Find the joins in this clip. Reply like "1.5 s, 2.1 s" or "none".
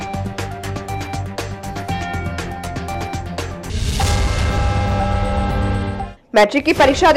none